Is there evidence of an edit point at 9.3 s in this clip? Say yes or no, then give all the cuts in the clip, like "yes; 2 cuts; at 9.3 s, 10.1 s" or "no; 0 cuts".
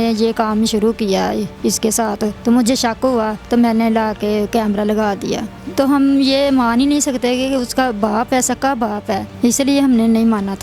yes; 4 cuts; at 2.4 s, 3.4 s, 5.6 s, 9.3 s